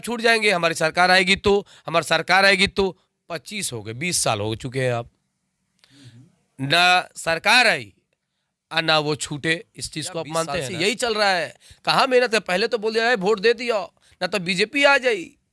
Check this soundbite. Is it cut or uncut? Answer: cut